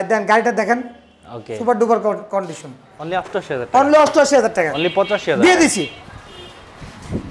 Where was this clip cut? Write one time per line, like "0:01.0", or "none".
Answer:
0:02.8